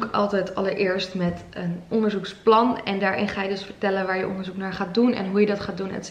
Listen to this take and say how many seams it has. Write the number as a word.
zero